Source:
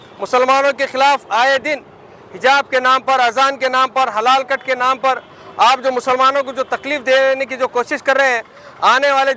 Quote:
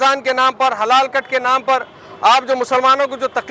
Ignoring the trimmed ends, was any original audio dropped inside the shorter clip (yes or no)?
no